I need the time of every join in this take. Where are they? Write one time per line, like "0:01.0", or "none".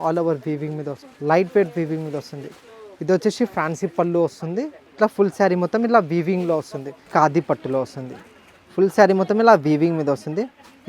0:01.0
0:04.8
0:07.0